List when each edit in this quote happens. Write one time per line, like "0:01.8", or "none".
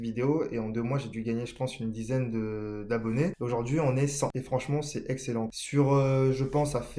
0:03.4
0:04.4
0:05.6